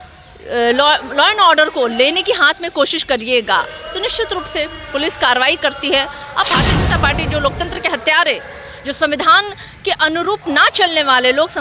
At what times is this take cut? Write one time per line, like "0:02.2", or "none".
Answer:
0:06.5